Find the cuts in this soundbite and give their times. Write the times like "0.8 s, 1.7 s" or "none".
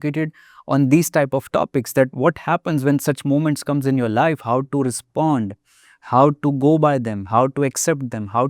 none